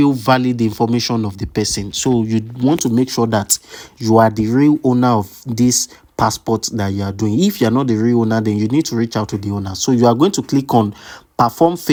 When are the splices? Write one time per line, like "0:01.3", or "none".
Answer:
none

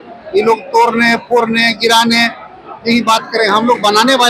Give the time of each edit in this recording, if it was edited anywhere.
none

